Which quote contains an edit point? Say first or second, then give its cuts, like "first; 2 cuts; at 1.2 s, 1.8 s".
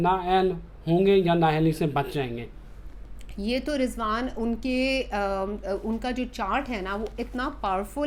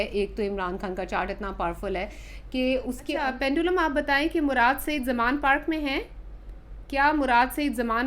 second; 1 cut; at 3.1 s